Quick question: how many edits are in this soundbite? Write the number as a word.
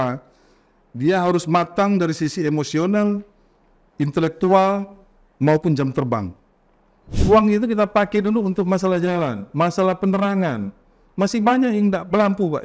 one